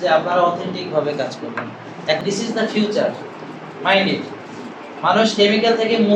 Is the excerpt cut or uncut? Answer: cut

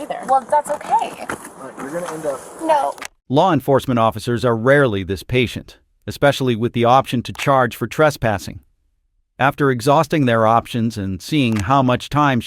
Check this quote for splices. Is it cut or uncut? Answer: uncut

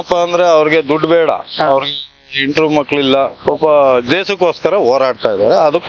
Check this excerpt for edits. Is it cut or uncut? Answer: uncut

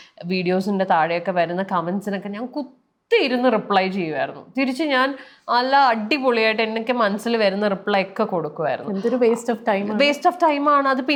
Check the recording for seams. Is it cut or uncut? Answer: uncut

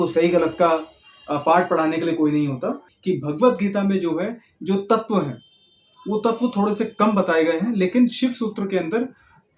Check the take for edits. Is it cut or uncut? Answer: cut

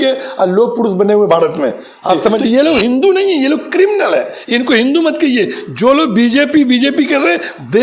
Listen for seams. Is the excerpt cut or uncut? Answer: cut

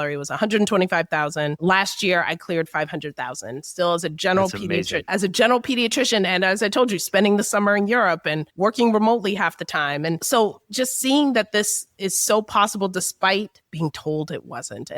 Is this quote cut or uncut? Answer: cut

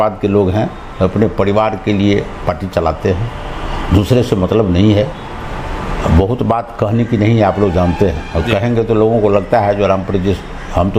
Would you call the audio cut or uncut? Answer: uncut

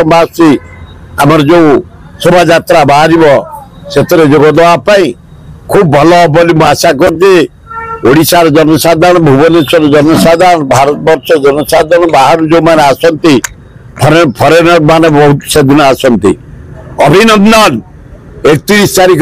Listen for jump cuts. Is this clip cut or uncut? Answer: uncut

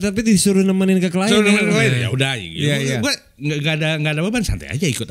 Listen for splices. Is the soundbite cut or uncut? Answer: uncut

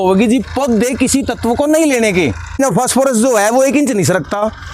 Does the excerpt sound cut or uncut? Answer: cut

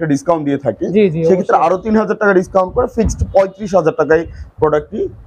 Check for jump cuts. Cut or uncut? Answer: uncut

